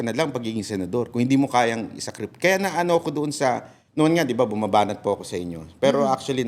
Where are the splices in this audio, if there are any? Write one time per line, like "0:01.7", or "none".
0:03.8